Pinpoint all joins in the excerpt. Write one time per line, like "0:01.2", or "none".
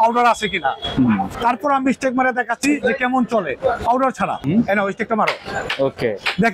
0:01.3
0:04.4